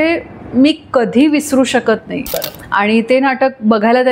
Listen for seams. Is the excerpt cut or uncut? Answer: cut